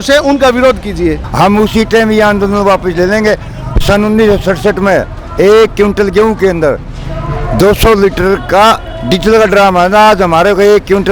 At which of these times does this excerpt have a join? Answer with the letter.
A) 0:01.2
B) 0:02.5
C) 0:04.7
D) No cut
A